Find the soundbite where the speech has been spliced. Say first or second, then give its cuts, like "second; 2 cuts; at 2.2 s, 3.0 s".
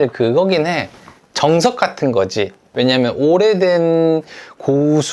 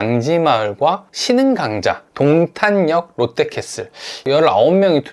second; 1 cut; at 4.2 s